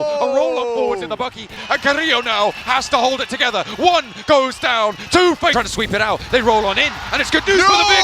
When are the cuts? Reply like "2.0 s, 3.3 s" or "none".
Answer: 1.6 s, 5.5 s